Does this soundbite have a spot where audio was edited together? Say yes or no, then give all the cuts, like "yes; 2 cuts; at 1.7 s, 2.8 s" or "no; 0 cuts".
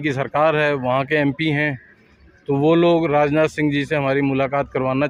no; 0 cuts